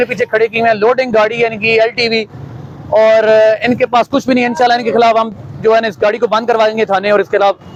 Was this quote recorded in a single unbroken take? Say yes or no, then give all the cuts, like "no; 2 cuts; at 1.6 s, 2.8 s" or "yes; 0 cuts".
yes; 0 cuts